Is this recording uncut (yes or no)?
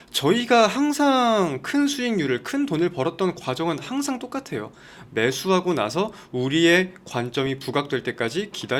yes